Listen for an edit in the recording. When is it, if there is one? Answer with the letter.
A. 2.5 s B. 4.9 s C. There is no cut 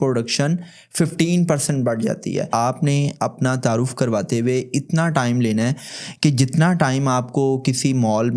A